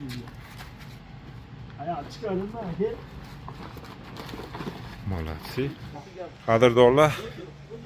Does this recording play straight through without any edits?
no; 1 cut; at 5.9 s

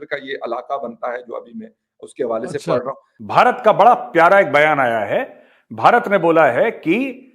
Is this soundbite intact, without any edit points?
no; 1 cut; at 3.1 s

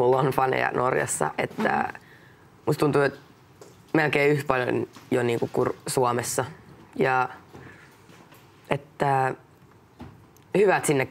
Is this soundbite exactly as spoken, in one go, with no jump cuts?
no; 1 cut; at 7.9 s

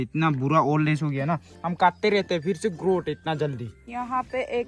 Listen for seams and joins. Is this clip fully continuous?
no; 1 cut; at 3.7 s

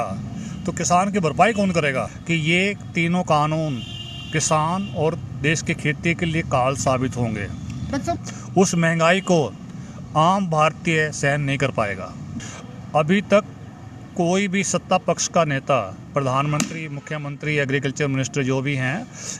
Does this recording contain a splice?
yes; 3 cuts; at 2.2 s, 8.2 s, 12.3 s

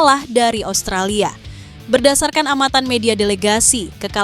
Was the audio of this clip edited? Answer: no; 0 cuts

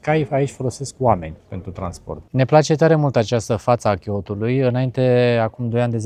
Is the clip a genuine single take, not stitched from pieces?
yes; 0 cuts

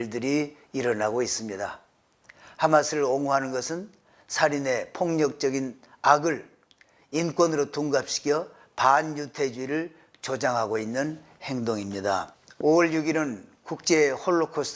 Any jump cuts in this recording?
yes; 1 cut; at 12.4 s

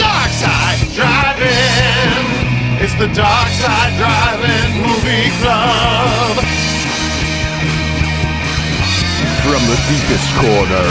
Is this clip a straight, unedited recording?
no; 1 cut; at 6.5 s

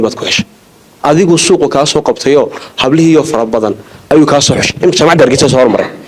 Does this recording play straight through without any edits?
yes; 0 cuts

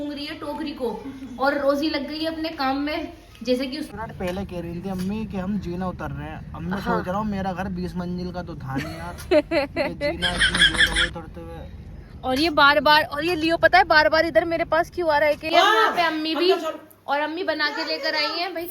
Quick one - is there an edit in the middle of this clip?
yes; 2 cuts; at 3.9 s, 15.4 s

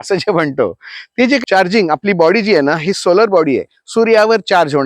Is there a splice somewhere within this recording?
yes; 1 cut; at 1.4 s

